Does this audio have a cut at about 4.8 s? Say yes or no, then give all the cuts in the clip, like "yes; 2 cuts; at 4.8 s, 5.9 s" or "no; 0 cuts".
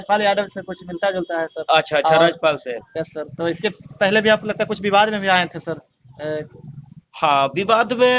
no; 0 cuts